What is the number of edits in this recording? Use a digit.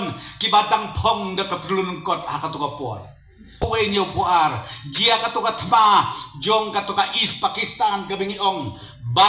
1